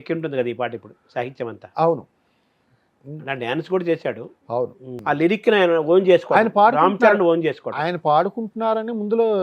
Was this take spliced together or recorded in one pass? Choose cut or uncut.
cut